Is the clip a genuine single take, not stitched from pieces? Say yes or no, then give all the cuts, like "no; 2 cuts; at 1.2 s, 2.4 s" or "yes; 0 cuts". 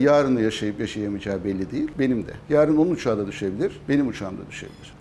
yes; 0 cuts